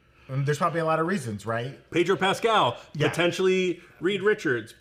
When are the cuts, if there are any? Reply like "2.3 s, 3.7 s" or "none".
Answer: 1.8 s